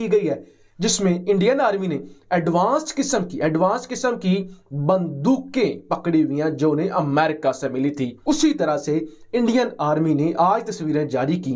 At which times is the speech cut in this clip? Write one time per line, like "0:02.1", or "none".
0:08.1